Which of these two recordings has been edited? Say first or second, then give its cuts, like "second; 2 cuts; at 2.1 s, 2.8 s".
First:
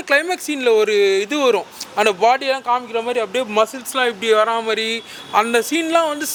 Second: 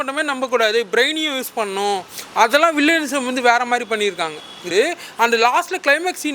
second; 1 cut; at 4.7 s